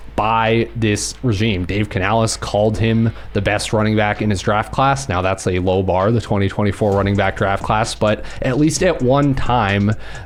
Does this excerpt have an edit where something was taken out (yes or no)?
no